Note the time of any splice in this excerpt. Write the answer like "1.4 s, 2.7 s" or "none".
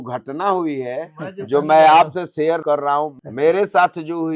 2.7 s